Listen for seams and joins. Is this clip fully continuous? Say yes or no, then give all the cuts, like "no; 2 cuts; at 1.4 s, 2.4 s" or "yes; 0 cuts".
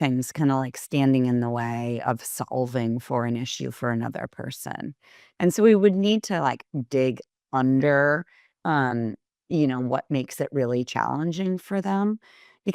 yes; 0 cuts